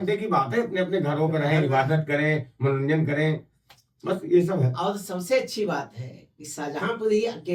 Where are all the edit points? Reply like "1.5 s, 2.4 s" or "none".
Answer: none